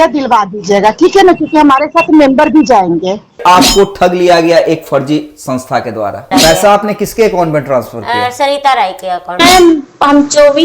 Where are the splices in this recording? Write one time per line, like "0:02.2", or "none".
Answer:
0:03.4
0:06.3
0:09.4

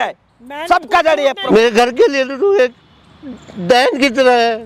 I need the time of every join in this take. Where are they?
0:01.4

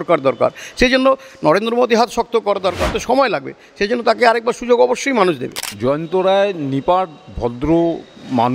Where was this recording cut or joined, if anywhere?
0:02.9
0:05.7

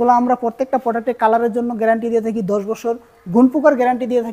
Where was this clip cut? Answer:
none

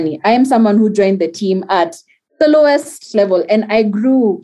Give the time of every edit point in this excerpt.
0:03.1

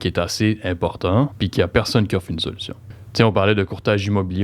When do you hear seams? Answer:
0:01.4
0:02.8

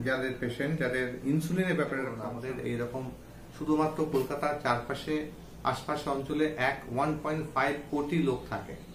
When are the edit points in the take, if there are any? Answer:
0:02.2

